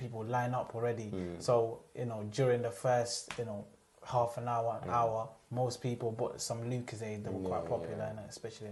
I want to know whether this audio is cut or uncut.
uncut